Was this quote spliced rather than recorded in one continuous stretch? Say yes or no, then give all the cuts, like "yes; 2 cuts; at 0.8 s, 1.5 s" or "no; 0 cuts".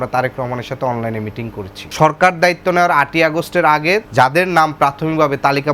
yes; 2 cuts; at 1.8 s, 4.1 s